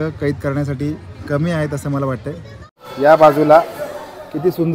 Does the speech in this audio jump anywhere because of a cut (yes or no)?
yes